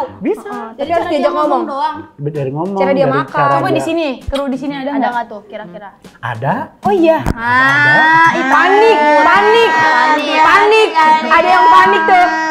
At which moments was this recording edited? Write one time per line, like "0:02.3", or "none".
none